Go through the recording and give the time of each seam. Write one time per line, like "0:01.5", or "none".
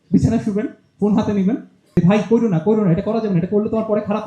0:01.9